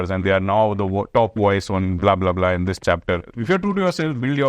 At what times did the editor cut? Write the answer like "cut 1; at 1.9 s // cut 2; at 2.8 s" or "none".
cut 1; at 3.3 s